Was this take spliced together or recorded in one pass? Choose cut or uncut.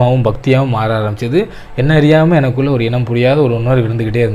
uncut